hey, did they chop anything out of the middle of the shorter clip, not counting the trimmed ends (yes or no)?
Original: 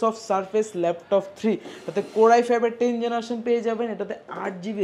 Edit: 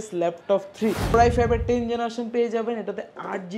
yes